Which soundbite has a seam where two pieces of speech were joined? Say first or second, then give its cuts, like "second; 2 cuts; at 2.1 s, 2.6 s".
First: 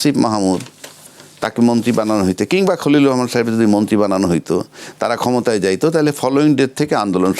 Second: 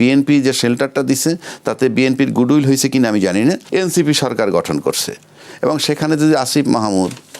second; 1 cut; at 3.6 s